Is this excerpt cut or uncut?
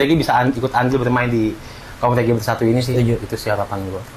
uncut